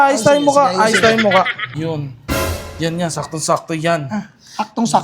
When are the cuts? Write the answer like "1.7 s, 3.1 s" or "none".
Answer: 1.7 s